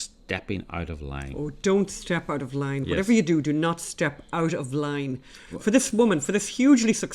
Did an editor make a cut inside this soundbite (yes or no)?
yes